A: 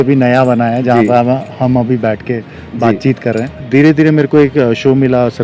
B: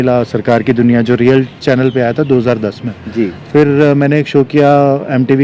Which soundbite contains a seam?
A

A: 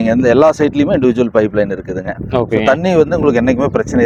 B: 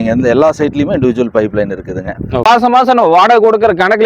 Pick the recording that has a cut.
B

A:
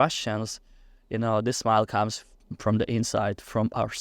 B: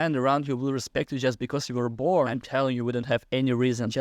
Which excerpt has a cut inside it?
B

